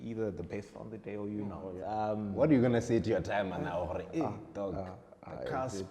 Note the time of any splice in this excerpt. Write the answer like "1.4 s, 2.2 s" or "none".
1.7 s